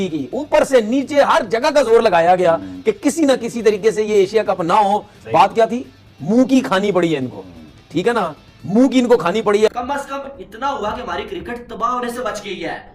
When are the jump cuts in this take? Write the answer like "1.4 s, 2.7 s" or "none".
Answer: 9.7 s